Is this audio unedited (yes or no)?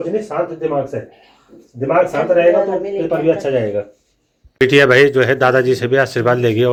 yes